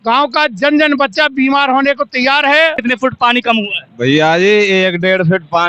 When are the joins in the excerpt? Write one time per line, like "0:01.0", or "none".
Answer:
0:02.8